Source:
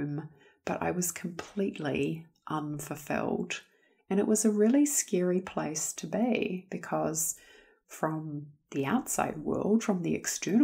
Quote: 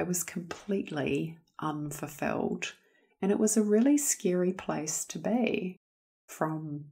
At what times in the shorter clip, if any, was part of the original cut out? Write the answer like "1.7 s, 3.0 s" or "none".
5.8 s